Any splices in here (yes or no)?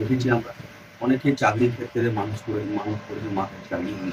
no